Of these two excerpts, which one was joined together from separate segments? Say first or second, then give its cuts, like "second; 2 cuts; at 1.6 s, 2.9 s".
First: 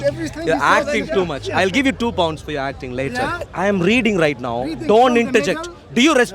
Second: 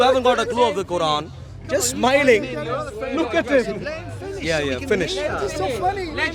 first; 1 cut; at 3.4 s